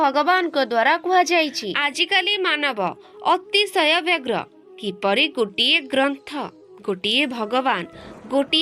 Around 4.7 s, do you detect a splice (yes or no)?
no